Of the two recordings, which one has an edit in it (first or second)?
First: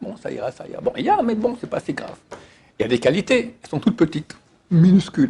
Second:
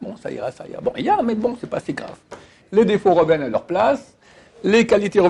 second